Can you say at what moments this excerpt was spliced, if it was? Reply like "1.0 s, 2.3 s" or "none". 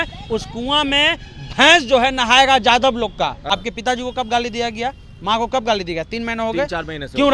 3.4 s